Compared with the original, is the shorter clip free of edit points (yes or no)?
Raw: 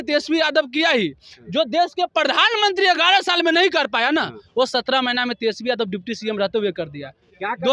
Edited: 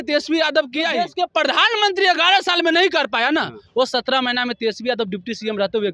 no